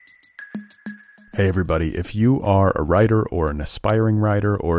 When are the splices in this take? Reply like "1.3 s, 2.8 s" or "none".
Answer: 0.9 s